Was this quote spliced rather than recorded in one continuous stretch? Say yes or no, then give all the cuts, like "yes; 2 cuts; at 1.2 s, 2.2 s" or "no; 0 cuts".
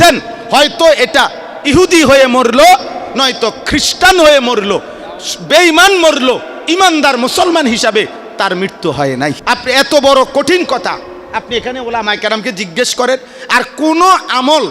yes; 1 cut; at 9.4 s